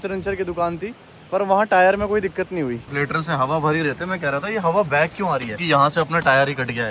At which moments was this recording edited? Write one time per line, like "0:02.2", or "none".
0:02.9
0:05.5